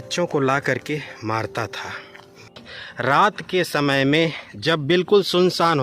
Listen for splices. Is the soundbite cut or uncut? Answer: cut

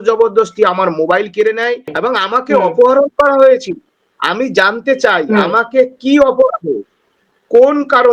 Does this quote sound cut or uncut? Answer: cut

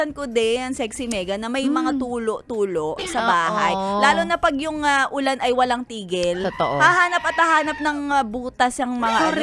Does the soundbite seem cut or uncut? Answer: uncut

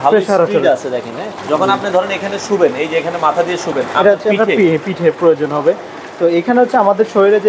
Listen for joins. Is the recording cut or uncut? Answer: cut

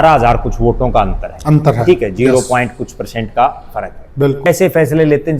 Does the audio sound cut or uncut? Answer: cut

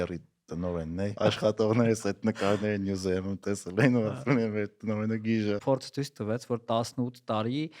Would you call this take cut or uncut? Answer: cut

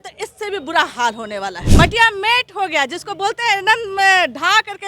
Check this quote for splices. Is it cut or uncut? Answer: cut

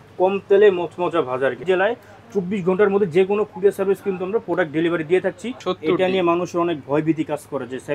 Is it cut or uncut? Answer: cut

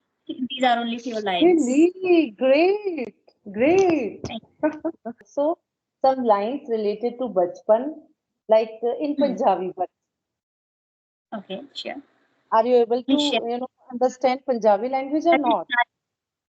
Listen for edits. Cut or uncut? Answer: cut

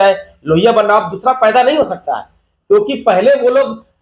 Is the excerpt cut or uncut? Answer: uncut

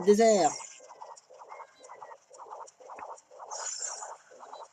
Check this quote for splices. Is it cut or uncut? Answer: cut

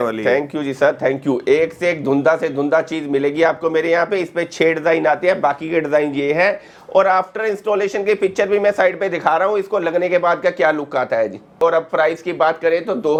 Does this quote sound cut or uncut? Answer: uncut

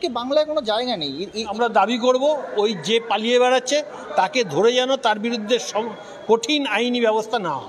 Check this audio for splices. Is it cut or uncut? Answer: cut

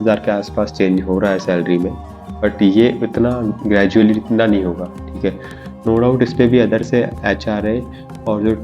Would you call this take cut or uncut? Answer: uncut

